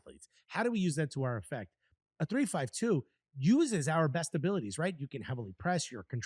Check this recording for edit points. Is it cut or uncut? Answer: uncut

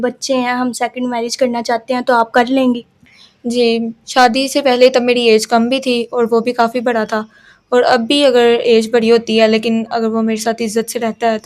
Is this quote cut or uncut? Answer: uncut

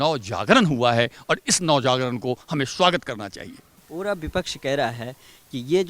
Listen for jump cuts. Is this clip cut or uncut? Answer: uncut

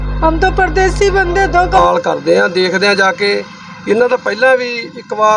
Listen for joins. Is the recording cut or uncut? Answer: cut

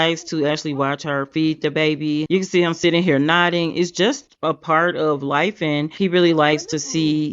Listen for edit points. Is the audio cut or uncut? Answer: uncut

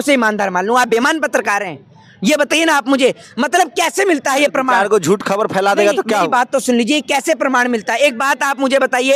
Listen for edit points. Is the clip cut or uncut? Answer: uncut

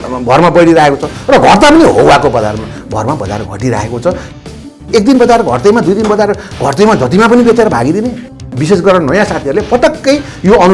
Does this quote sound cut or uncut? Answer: cut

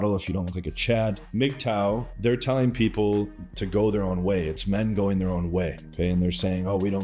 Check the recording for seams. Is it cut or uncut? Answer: cut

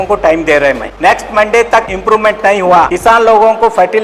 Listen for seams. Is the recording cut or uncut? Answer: cut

